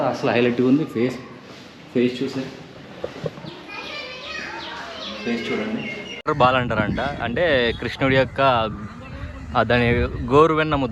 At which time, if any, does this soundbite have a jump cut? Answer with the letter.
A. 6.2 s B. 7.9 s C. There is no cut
A